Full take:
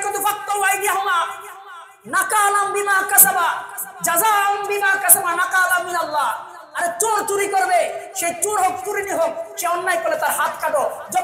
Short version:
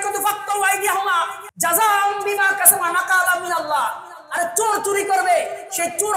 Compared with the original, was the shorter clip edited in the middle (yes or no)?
yes